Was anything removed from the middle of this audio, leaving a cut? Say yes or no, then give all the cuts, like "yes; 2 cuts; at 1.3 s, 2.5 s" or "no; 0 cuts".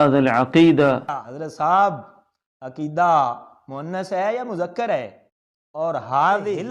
yes; 1 cut; at 1.0 s